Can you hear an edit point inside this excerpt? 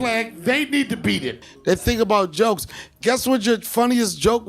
yes; 1 cut; at 1.5 s

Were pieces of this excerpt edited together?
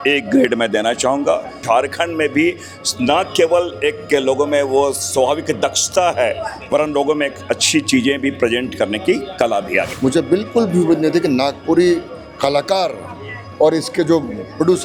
yes; 2 cuts; at 1.6 s, 9.9 s

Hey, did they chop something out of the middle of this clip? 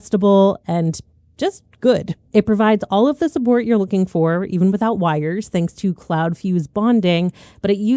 no; 0 cuts

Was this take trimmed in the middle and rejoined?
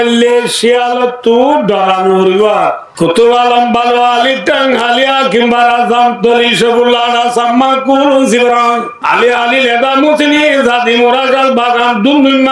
yes; 2 cuts; at 2.9 s, 8.9 s

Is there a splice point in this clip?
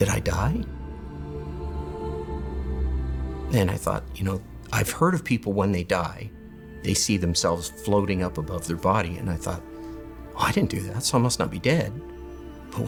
no; 0 cuts

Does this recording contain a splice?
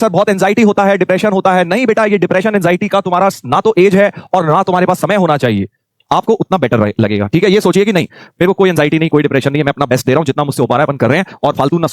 yes; 1 cut; at 5.9 s

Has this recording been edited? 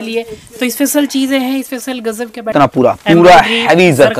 yes; 1 cut; at 2.5 s

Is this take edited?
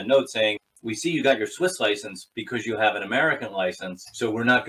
no; 0 cuts

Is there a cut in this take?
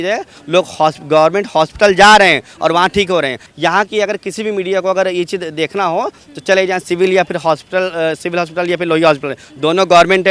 no; 0 cuts

